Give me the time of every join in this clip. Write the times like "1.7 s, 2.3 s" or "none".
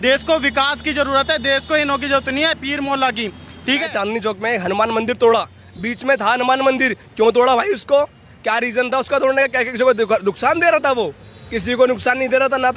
3.9 s